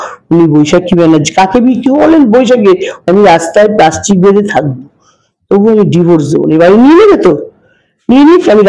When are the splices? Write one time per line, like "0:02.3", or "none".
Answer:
0:03.0